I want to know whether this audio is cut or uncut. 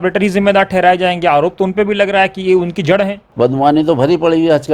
cut